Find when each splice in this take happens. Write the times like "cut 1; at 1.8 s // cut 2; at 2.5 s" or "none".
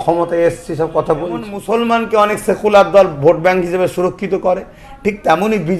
cut 1; at 1.6 s

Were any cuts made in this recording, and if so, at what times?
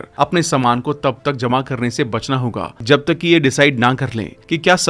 none

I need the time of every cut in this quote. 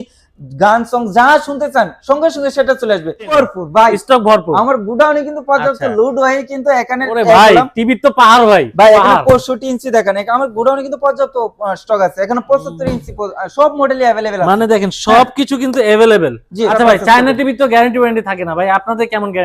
cut 1; at 3.3 s // cut 2; at 16.7 s

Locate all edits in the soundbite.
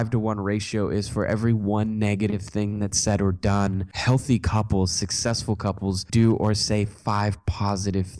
cut 1; at 3.9 s // cut 2; at 6.0 s

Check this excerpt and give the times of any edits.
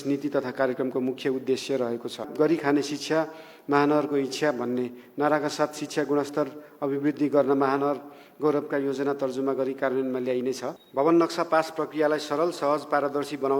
cut 1; at 2.3 s // cut 2; at 10.8 s

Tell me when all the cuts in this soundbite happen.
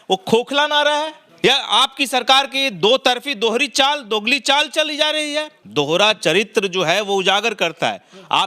cut 1; at 1.2 s // cut 2; at 5.6 s

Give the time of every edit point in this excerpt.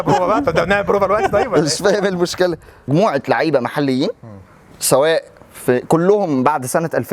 cut 1; at 2.9 s

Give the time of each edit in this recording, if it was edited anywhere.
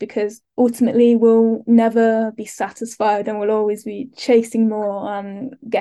none

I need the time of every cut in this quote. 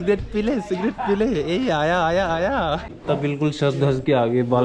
cut 1; at 2.9 s

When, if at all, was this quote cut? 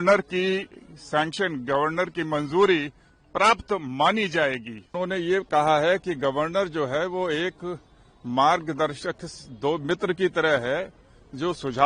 cut 1; at 4.9 s

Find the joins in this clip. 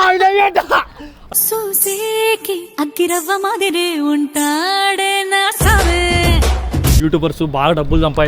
cut 1; at 7.0 s

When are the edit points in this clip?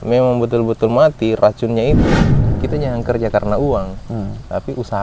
cut 1; at 2.4 s

